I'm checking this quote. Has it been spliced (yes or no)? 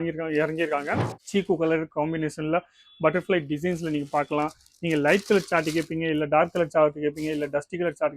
yes